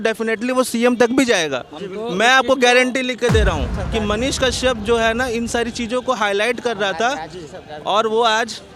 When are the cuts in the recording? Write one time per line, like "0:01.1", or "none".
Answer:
0:03.7